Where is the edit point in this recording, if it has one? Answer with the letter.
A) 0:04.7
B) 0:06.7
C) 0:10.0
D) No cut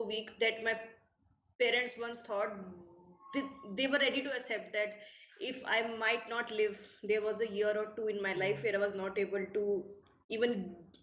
D